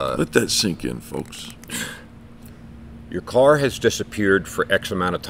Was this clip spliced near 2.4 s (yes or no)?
yes